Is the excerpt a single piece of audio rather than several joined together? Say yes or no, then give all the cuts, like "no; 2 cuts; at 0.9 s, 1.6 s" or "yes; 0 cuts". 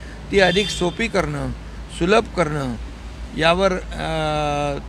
yes; 0 cuts